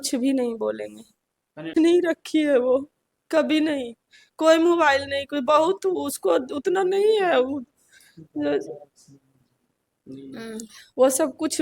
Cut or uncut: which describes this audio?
cut